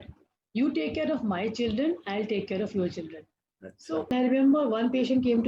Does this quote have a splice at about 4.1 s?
yes; 1 cut; at 4.1 s

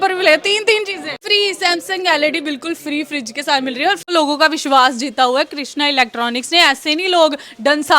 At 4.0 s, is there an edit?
yes; 2 cuts; at 1.2 s, 4.0 s

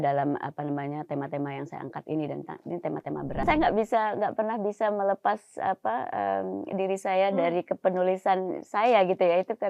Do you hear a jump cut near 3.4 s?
yes; 1 cut; at 3.4 s

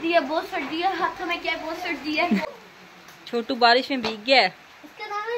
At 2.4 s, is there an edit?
yes; 1 cut; at 2.4 s

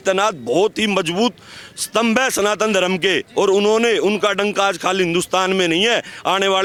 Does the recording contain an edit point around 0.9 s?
no; 0 cuts

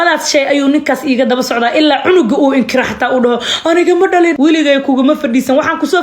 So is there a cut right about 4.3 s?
yes; 1 cut; at 4.3 s

